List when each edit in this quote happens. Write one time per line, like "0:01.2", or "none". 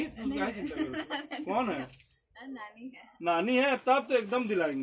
none

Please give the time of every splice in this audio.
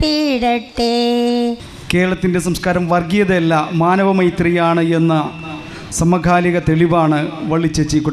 0:01.7

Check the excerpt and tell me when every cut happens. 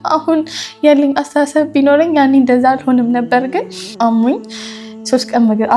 0:03.9

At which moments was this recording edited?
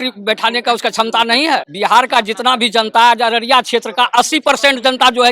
0:01.7

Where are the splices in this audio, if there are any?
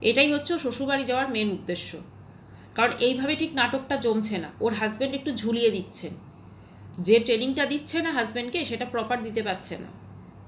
none

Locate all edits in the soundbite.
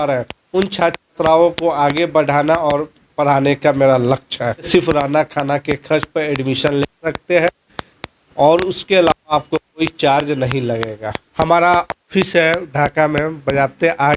0:04.7
0:11.1

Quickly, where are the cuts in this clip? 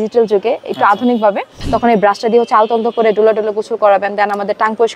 0:01.5

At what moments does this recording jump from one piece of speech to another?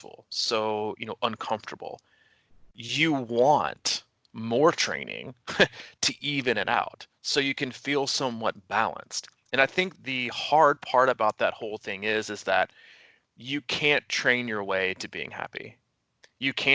0:10.0

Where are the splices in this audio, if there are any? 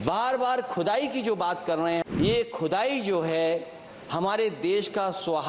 0:02.1

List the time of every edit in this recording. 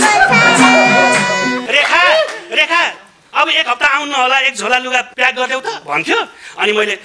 0:01.5
0:05.1

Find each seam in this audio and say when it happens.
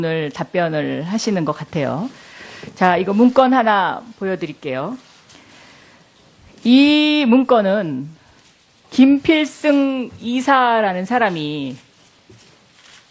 none

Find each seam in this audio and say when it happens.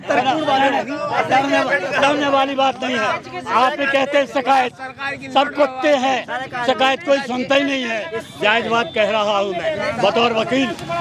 none

